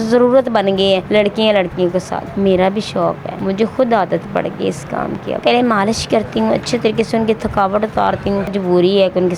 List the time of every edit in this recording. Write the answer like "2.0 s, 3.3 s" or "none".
1.0 s, 2.2 s, 3.3 s, 5.4 s, 8.6 s